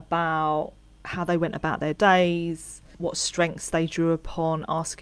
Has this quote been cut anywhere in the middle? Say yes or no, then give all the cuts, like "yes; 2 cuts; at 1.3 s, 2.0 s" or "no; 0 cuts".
no; 0 cuts